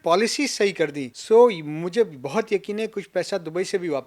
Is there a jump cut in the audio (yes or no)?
no